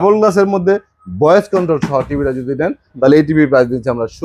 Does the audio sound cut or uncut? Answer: uncut